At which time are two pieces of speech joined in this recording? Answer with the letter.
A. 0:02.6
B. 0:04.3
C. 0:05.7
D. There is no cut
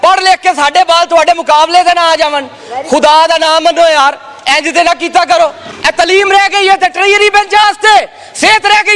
C